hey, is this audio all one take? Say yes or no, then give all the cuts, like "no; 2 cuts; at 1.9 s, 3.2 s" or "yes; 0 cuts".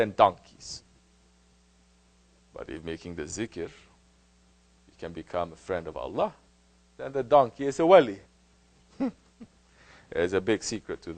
yes; 0 cuts